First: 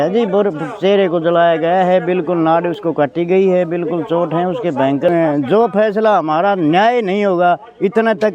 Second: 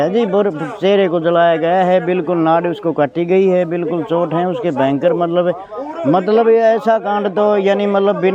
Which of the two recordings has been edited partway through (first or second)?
first